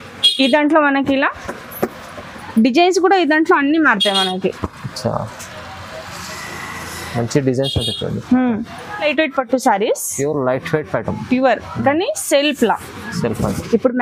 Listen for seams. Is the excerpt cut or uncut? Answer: cut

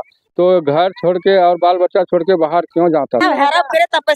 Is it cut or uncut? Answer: cut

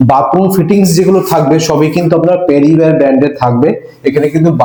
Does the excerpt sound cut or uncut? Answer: uncut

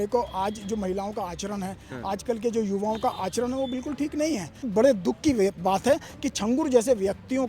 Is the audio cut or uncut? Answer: cut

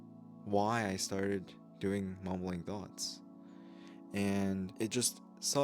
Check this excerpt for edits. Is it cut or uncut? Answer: cut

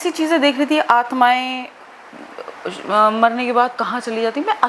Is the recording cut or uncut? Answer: uncut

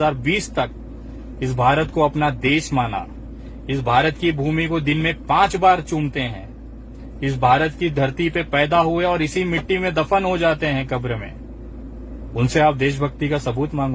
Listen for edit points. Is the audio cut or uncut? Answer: uncut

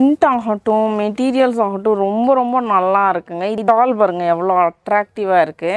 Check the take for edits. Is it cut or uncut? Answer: cut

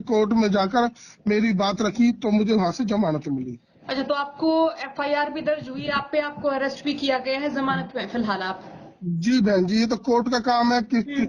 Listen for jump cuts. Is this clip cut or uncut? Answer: uncut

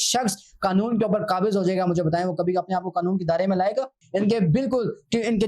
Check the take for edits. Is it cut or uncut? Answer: cut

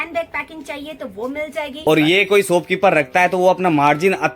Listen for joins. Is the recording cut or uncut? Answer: cut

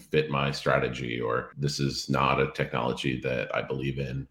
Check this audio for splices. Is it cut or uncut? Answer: cut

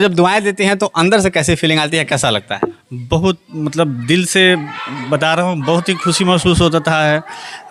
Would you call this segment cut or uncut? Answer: uncut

